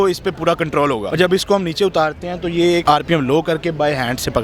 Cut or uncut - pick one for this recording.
cut